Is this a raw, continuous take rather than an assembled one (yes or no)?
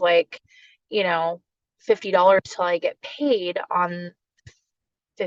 yes